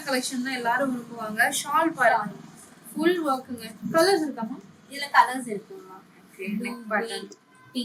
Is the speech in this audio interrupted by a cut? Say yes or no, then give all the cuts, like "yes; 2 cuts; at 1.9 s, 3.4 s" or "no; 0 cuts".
no; 0 cuts